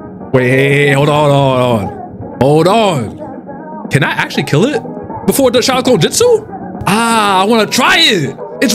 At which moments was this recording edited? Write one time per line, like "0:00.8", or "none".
none